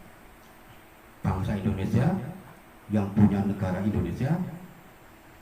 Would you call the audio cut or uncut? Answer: uncut